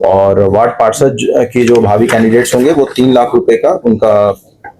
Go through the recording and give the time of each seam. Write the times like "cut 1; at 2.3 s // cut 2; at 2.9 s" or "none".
none